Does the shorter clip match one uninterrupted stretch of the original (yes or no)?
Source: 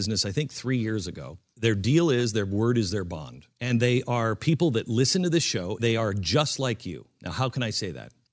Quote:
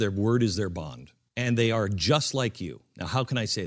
no